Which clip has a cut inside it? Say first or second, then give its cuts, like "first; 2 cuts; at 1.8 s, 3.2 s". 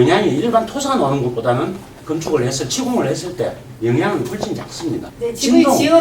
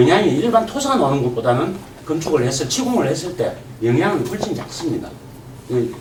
first; 1 cut; at 5.1 s